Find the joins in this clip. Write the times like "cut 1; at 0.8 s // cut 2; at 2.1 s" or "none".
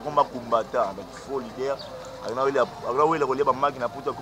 none